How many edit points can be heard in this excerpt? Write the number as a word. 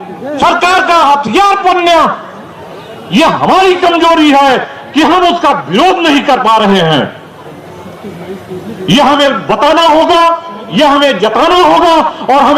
zero